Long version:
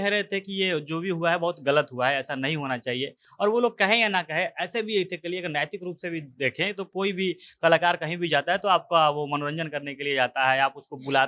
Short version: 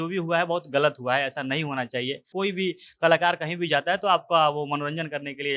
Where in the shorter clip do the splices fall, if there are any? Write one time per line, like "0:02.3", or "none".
0:02.3